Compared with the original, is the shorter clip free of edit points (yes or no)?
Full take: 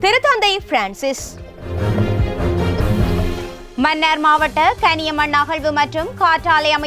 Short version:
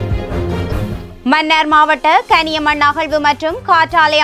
no